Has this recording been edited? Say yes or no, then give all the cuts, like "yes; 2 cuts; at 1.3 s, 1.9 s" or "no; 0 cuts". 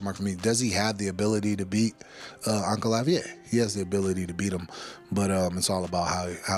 no; 0 cuts